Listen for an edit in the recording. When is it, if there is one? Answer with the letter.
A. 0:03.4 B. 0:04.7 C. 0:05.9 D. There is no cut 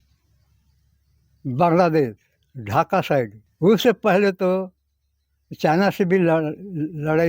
A